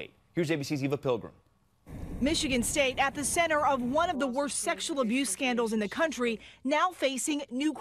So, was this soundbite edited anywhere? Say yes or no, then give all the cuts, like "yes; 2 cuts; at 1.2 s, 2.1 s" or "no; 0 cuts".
yes; 1 cut; at 6.1 s